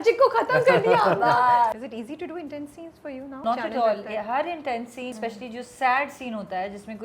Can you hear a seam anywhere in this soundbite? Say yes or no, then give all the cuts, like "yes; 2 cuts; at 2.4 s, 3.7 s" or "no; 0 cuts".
yes; 3 cuts; at 1.7 s, 3.4 s, 5.1 s